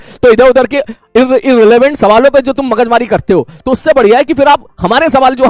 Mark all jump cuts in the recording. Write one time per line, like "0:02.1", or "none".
none